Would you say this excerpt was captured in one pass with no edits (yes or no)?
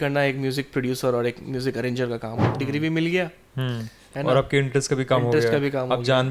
no